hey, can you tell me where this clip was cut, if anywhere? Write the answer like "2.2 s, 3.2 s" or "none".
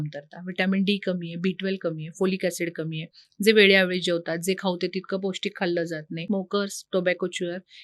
6.1 s